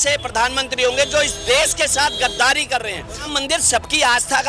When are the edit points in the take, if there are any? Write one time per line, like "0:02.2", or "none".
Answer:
0:03.3